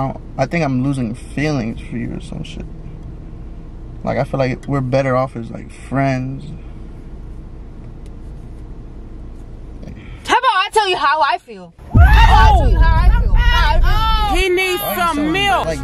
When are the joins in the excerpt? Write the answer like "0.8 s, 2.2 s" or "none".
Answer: 9.8 s